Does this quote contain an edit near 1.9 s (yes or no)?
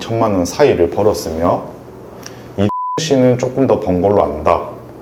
no